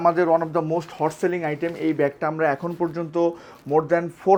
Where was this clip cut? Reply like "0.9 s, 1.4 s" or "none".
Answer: none

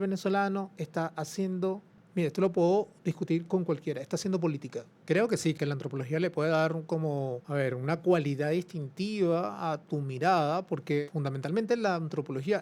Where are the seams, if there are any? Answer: 1.9 s, 4.9 s, 5.5 s, 7.4 s, 11.0 s

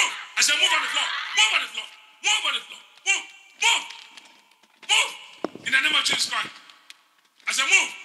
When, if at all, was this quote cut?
none

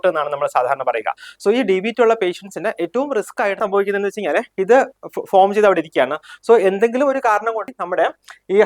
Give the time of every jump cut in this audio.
3.6 s, 7.7 s

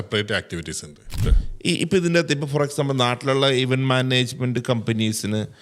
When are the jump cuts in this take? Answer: 1.4 s

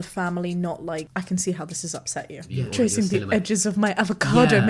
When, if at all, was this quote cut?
1.1 s, 2.5 s

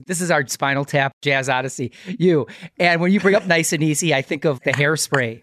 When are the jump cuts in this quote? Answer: none

